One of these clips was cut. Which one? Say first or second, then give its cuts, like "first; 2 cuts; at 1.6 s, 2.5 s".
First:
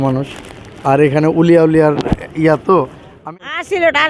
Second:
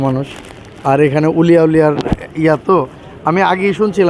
first; 1 cut; at 3.1 s